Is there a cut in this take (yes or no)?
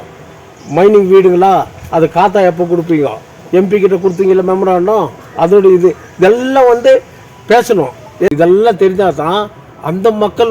yes